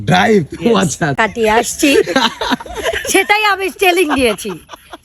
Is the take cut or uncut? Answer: cut